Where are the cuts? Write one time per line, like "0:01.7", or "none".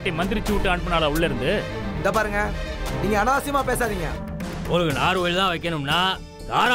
0:04.2

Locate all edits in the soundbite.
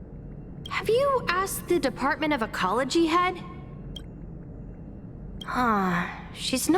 0:00.7
0:03.4
0:05.5

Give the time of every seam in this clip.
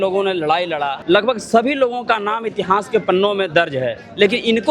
0:00.9

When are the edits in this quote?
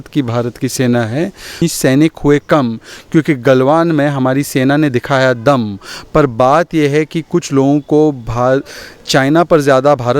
0:01.6

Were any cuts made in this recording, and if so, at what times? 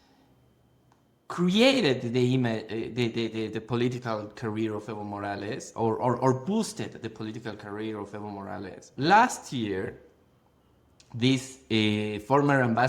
0:08.9

